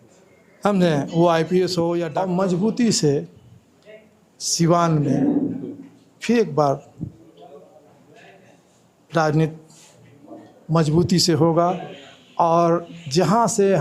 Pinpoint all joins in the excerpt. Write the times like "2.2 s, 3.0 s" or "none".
2.1 s